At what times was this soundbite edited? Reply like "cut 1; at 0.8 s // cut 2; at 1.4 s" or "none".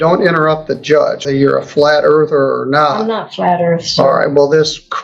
cut 1; at 1.3 s

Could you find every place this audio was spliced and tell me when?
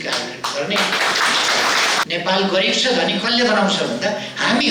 cut 1; at 2.1 s

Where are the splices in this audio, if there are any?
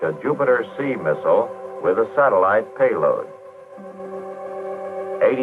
cut 1; at 1.7 s

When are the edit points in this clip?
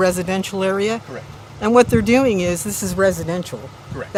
none

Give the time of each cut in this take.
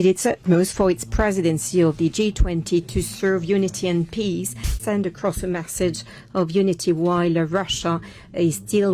cut 1; at 4.8 s

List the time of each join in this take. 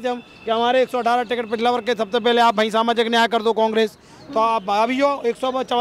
none

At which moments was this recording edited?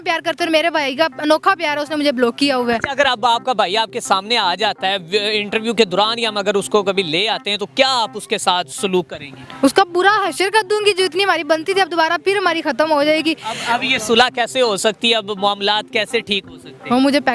none

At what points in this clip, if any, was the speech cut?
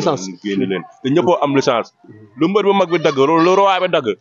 none

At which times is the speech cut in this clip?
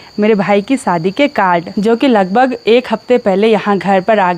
none

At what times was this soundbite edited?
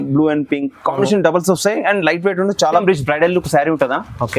cut 1; at 2.7 s

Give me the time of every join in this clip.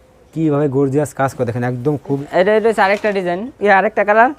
cut 1; at 2.2 s

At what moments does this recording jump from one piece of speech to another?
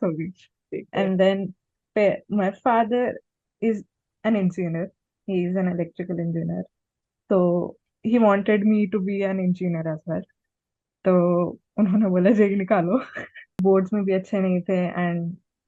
cut 1; at 13.6 s

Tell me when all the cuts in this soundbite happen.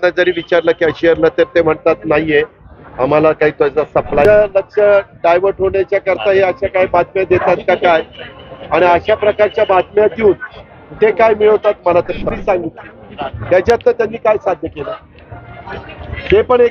cut 1; at 4.2 s // cut 2; at 12.3 s

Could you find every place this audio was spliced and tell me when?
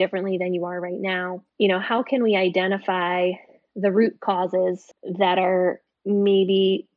cut 1; at 1.4 s

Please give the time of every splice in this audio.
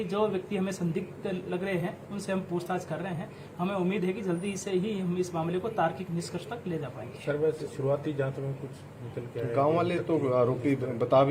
none

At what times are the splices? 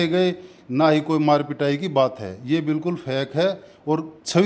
none

